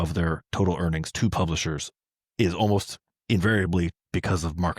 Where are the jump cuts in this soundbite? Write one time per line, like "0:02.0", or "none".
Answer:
none